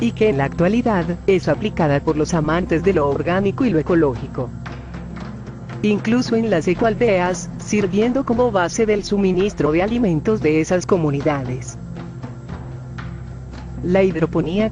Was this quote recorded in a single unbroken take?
no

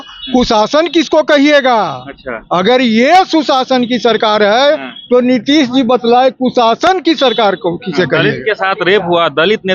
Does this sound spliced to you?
no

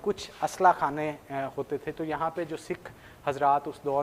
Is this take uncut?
yes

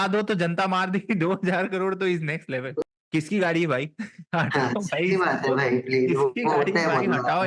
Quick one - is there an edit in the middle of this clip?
yes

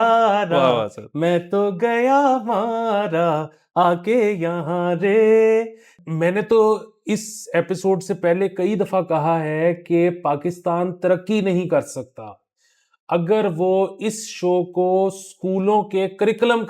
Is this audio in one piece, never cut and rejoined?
no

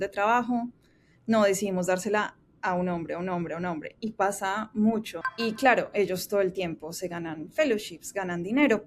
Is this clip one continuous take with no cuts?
no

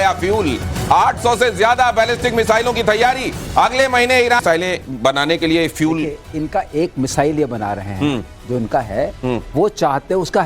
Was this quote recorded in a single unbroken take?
no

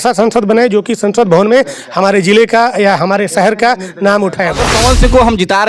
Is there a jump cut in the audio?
yes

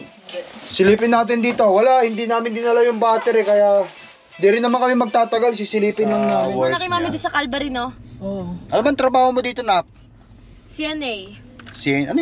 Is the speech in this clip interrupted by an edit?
yes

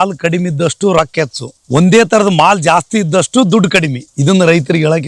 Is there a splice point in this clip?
no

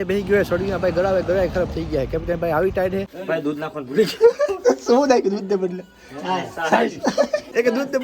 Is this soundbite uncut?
no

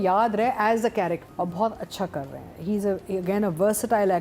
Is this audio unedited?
no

